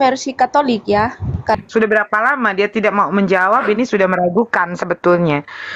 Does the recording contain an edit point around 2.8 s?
no; 1 cut; at 1.6 s

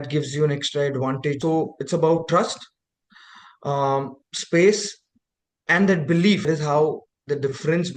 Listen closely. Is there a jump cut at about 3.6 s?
no; 2 cuts; at 1.4 s, 6.5 s

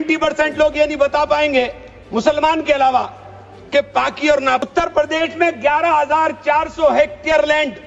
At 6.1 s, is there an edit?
no; 1 cut; at 4.6 s

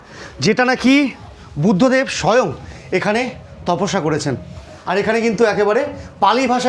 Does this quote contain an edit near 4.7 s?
yes; 1 cut; at 4.7 s

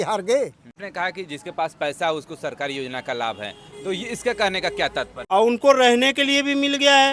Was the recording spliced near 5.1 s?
yes; 2 cuts; at 0.8 s, 5.1 s

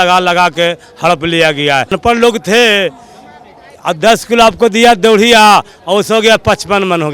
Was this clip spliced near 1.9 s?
yes; 1 cut; at 1.9 s

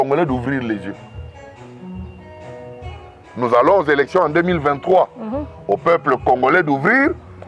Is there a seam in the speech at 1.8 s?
no; 0 cuts

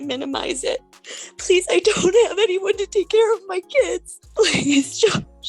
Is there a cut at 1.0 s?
yes; 2 cuts; at 1.0 s, 4.1 s

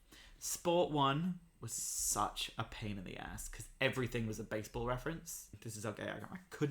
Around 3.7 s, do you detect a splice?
no; 1 cut; at 5.7 s

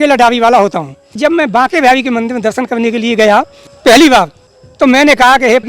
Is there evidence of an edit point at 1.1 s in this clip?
yes; 2 cuts; at 1.1 s, 3.6 s

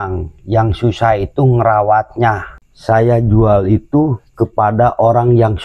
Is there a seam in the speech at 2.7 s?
yes; 1 cut; at 2.7 s

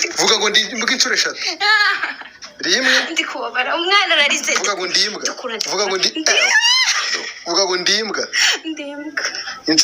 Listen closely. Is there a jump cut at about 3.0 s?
no; 3 cuts; at 1.7 s, 5.5 s, 8.6 s

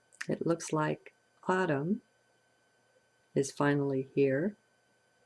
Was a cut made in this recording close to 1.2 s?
no; 0 cuts

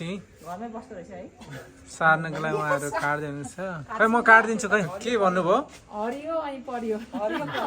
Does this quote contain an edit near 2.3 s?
no; 1 cut; at 4.9 s

